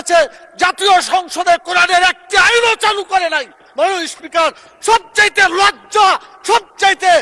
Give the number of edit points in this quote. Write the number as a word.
zero